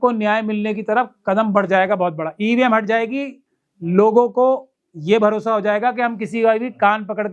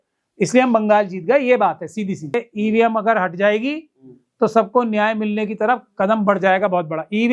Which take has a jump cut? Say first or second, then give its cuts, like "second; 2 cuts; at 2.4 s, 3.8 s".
second; 1 cut; at 2.4 s